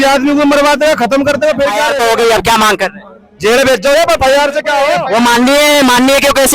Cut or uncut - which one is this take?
cut